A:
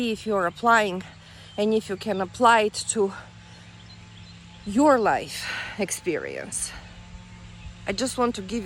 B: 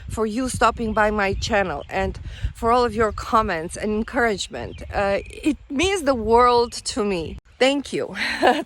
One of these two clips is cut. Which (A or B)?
B